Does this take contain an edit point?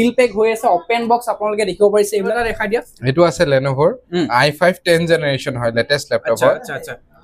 no; 0 cuts

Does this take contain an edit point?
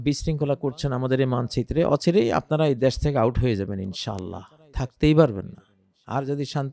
no; 0 cuts

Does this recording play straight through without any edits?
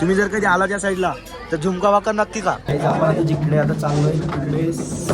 no; 1 cut; at 2.6 s

